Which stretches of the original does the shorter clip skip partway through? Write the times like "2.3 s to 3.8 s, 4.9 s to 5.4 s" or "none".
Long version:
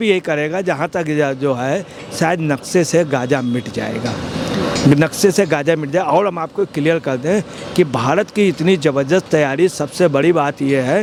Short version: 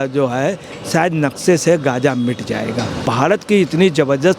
4.3 s to 7.9 s